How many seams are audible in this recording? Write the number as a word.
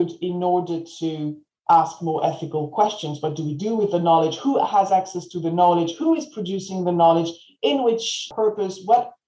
one